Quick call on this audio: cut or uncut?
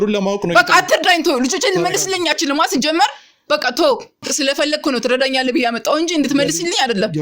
cut